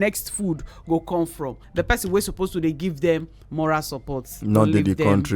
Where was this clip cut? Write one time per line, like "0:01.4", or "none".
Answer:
0:01.6